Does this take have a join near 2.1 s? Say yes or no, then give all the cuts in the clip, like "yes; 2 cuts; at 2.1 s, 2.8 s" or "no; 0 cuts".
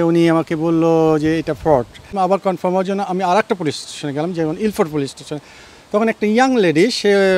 yes; 1 cut; at 2.1 s